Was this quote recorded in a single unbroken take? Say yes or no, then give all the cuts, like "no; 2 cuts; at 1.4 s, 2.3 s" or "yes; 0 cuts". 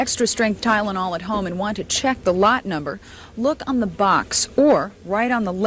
yes; 0 cuts